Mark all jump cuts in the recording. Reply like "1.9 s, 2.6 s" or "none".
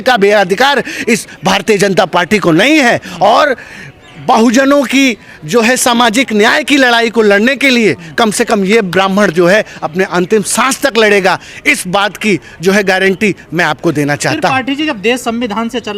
none